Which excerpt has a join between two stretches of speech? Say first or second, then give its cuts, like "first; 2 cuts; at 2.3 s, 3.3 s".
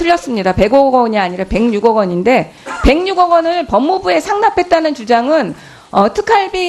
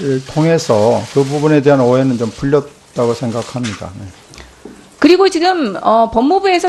first; 1 cut; at 4.4 s